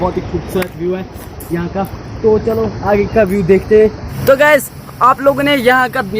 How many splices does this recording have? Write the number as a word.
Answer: one